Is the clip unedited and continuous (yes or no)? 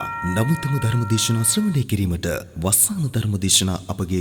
yes